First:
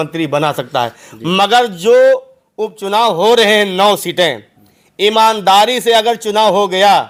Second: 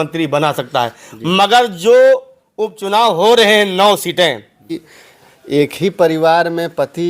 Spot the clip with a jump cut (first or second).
second